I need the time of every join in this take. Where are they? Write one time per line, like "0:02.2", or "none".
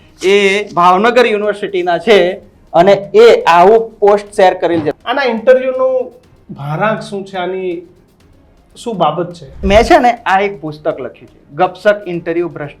0:04.9
0:09.6